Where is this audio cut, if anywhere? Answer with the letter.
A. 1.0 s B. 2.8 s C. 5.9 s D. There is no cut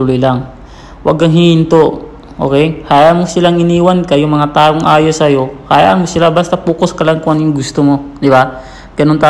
D